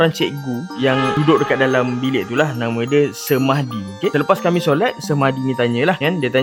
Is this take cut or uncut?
uncut